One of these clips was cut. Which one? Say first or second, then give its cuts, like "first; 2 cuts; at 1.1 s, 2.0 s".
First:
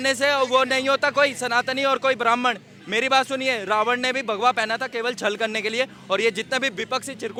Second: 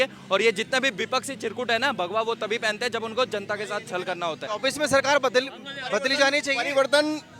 second; 1 cut; at 4.4 s